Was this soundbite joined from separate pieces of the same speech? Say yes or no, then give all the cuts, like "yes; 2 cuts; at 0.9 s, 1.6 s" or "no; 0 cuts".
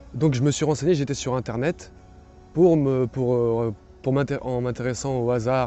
no; 0 cuts